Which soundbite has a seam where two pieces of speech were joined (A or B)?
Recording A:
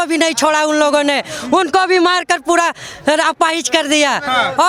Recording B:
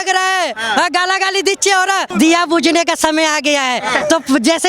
B